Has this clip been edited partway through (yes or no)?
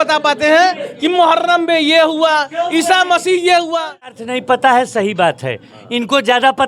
yes